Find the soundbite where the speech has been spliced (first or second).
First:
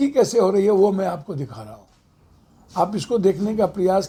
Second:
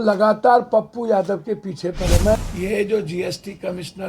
second